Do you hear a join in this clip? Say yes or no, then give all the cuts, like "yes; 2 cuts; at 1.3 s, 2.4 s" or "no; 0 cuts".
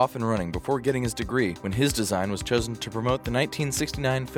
yes; 1 cut; at 1.6 s